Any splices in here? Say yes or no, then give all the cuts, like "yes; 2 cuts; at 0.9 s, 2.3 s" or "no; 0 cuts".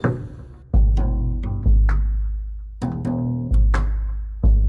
no; 0 cuts